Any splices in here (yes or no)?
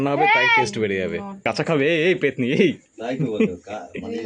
yes